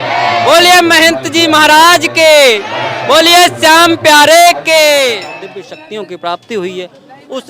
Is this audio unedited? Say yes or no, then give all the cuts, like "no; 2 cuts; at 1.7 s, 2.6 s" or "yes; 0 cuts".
no; 1 cut; at 5.3 s